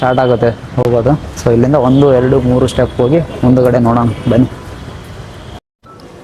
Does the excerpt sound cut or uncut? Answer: uncut